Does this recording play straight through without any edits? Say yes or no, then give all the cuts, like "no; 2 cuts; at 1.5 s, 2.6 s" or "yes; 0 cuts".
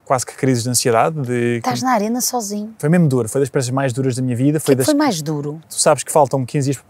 no; 2 cuts; at 2.8 s, 5.7 s